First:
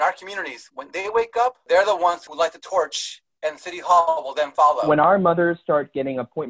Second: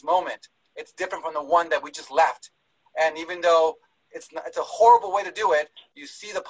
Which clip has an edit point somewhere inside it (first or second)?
first